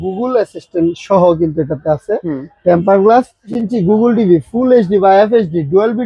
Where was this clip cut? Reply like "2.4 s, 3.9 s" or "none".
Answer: 3.6 s

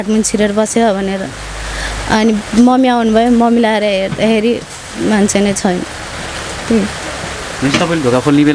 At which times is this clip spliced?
none

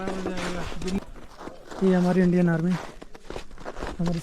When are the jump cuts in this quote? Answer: 1.0 s

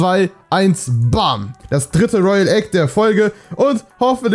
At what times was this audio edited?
1.6 s

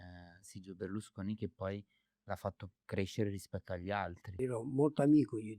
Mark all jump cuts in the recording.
4.3 s

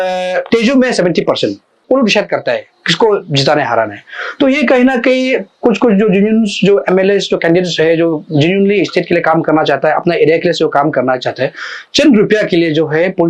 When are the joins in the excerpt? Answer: 1.8 s

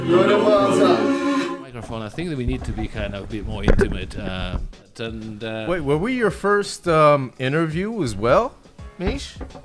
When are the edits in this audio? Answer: 1.6 s, 4.9 s

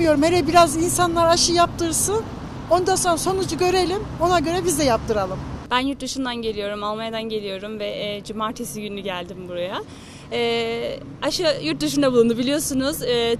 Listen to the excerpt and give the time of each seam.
none

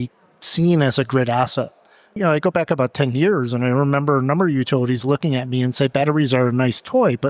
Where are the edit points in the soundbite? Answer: 2.2 s

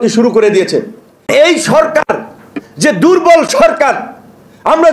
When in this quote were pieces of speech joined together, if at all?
1.3 s

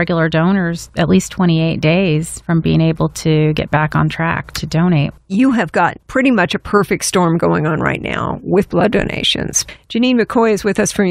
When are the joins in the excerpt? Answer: 9.8 s

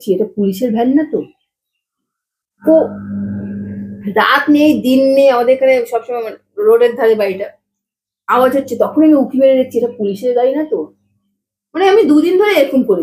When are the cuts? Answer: none

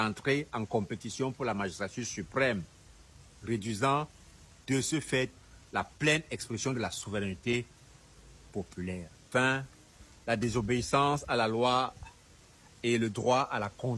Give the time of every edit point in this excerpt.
9.2 s

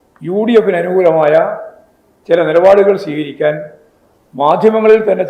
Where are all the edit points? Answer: none

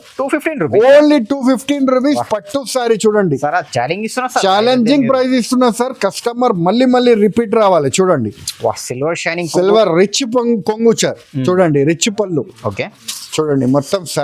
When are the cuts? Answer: none

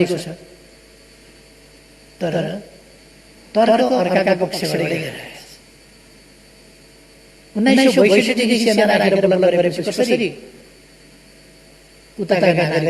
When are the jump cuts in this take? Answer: none

